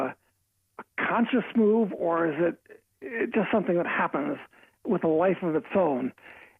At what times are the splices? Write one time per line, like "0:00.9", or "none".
0:04.1